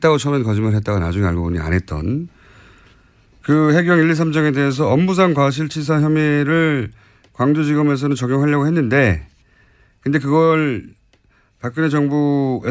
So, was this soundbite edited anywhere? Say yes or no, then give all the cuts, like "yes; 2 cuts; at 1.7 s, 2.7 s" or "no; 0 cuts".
yes; 1 cut; at 10.5 s